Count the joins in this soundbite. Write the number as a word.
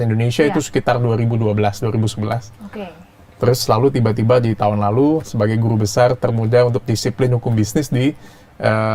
zero